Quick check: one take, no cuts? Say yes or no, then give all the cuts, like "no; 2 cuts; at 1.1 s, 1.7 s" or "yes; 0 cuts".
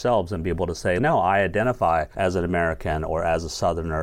no; 2 cuts; at 1.0 s, 2.1 s